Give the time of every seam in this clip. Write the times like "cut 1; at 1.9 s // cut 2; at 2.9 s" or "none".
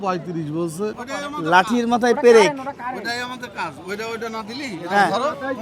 cut 1; at 1.0 s